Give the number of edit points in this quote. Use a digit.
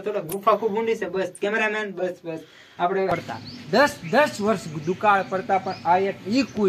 1